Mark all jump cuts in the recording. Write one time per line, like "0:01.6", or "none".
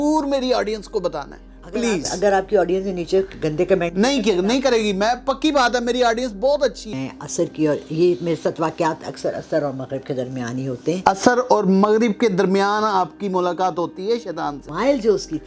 0:07.0
0:14.6